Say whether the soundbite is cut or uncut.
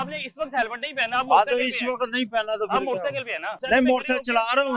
cut